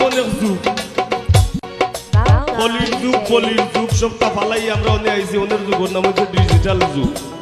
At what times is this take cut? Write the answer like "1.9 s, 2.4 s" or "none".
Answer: 1.3 s